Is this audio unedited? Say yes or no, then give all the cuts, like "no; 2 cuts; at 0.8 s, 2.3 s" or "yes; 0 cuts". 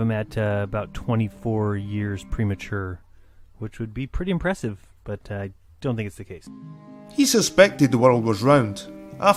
yes; 0 cuts